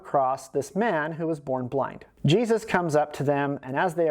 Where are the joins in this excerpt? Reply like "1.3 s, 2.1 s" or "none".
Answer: 2.0 s